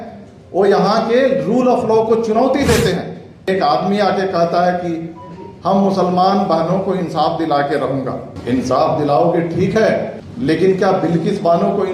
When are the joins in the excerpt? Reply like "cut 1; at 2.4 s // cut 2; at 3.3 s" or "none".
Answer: cut 1; at 3.5 s // cut 2; at 8.3 s // cut 3; at 10.2 s